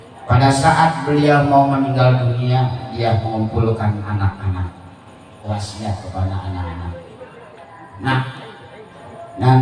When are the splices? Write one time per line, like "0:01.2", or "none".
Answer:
0:05.4